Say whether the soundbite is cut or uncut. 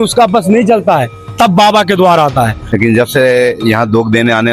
cut